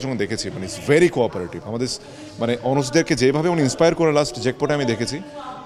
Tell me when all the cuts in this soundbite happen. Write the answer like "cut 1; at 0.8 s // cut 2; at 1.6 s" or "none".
none

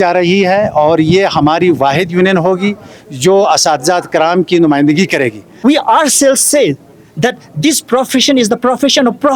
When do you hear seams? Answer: cut 1; at 5.4 s

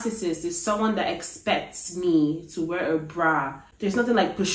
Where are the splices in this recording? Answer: cut 1; at 3.6 s

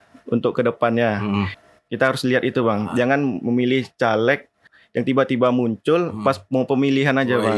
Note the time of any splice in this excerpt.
cut 1; at 1.6 s // cut 2; at 4.7 s

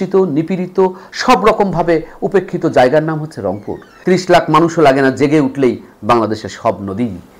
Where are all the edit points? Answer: cut 1; at 3.9 s

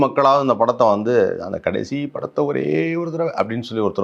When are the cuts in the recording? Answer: none

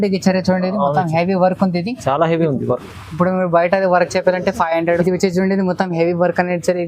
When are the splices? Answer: cut 1; at 5.0 s

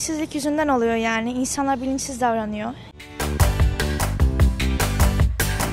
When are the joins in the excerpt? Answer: cut 1; at 2.8 s

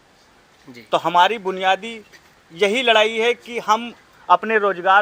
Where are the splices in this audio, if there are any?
none

